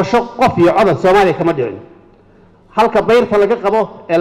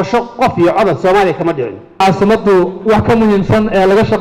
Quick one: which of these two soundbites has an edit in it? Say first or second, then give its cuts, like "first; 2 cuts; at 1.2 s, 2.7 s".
second; 1 cut; at 2.0 s